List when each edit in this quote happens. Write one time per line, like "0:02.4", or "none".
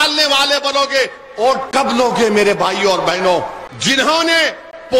0:03.6